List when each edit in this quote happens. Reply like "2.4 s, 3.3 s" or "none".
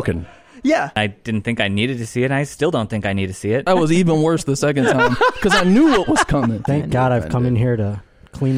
1.0 s, 3.7 s, 6.6 s

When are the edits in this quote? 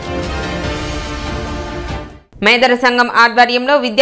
2.2 s

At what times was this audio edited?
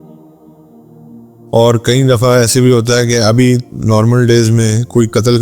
1.5 s

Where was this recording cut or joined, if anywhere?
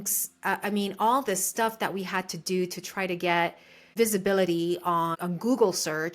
3.9 s, 5.1 s

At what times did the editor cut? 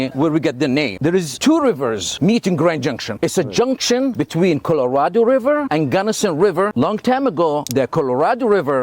0.9 s, 6.7 s

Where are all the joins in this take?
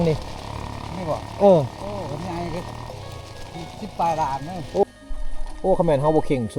4.8 s

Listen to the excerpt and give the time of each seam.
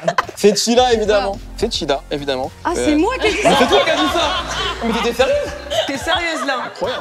none

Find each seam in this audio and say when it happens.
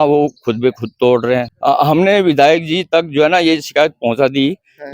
1.5 s

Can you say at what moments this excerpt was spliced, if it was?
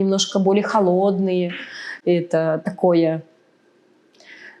none

